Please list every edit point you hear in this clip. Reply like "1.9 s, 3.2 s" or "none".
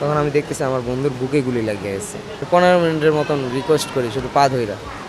2.4 s